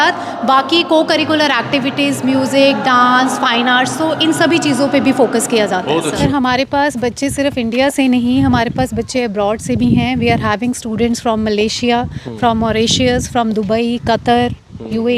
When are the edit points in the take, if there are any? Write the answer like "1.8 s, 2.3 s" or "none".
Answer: 6.2 s